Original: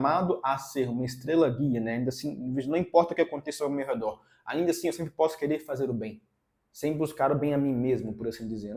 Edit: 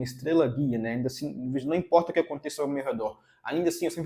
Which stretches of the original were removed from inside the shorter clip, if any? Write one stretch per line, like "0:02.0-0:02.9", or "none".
none